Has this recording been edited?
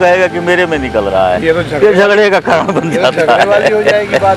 no; 0 cuts

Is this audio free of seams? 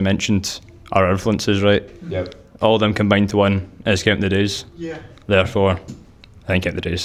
yes; 0 cuts

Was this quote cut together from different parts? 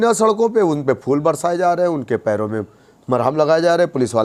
no; 0 cuts

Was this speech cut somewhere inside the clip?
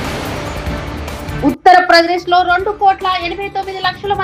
no; 0 cuts

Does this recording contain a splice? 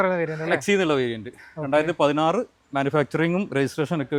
no; 0 cuts

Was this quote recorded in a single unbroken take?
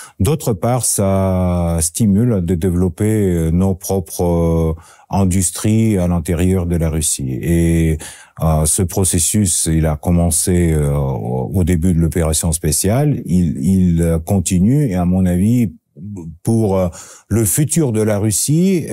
yes; 0 cuts

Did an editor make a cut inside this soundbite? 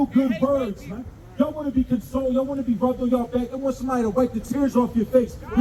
no; 0 cuts

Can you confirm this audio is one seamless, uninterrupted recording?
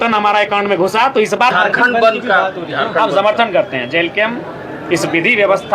no; 1 cut; at 1.5 s

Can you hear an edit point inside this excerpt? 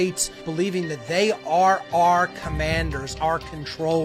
yes; 1 cut; at 3.1 s

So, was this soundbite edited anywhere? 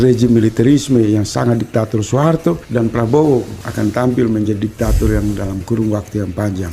yes; 2 cuts; at 2.6 s, 3.6 s

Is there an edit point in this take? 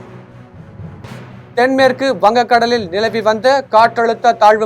yes; 1 cut; at 1.5 s

